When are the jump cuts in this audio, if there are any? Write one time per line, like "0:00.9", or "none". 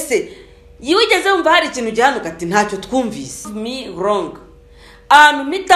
0:03.5